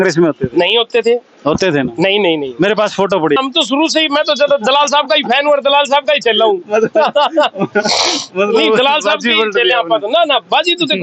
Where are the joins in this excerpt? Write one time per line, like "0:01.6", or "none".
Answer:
0:03.4